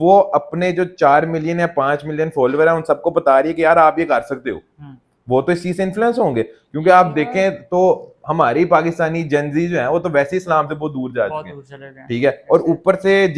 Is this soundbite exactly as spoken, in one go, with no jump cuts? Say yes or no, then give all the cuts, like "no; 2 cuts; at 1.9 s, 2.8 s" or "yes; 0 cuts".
yes; 0 cuts